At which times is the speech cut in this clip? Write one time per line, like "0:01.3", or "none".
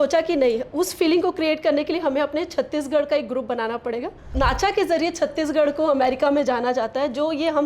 0:04.3